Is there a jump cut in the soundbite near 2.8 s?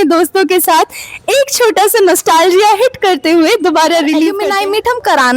no; 1 cut; at 4.3 s

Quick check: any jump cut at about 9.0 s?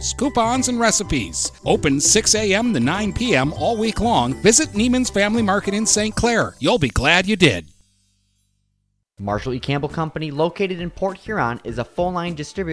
yes; 1 cut; at 9.0 s

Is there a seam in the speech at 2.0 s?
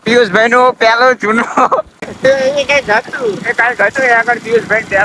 yes; 1 cut; at 2.0 s

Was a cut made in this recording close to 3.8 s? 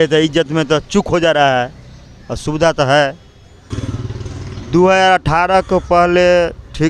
yes; 1 cut; at 3.8 s

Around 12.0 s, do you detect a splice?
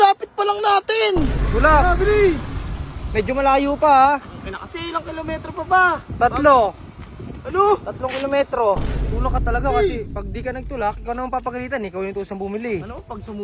no; 2 cuts; at 1.4 s, 8.9 s

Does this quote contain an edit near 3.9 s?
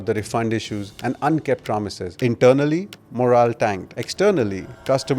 no; 1 cut; at 2.1 s

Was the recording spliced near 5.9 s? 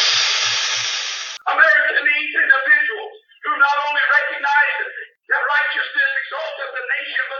no; 1 cut; at 1.2 s

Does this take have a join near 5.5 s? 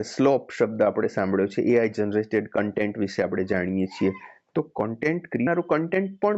yes; 1 cut; at 5.5 s

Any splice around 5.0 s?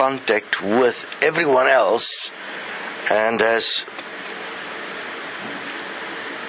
no; 1 cut; at 2.1 s

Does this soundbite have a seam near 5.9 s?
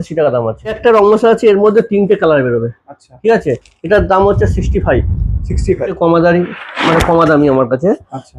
yes; 2 cuts; at 0.8 s, 5.9 s

